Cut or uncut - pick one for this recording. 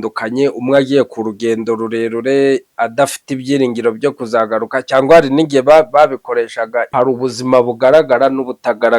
cut